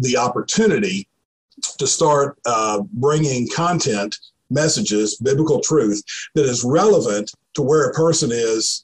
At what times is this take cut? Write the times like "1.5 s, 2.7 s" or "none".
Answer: none